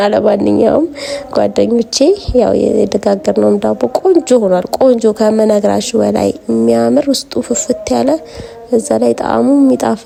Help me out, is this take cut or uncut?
uncut